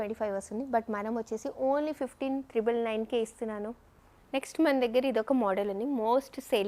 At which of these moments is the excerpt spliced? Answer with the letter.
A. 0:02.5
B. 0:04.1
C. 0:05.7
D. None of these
B